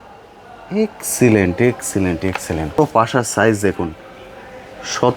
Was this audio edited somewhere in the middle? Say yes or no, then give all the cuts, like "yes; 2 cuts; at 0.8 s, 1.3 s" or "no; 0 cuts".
yes; 1 cut; at 2.8 s